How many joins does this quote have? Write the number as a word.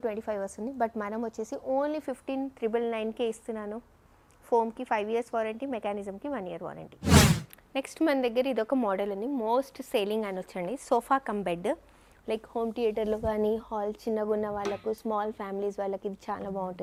zero